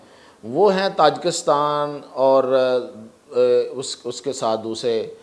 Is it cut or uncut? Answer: uncut